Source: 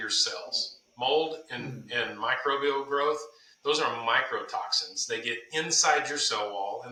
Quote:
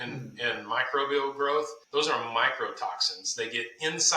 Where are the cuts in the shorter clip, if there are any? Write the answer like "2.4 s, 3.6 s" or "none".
1.8 s